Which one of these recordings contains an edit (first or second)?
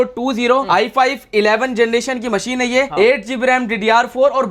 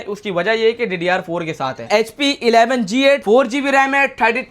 second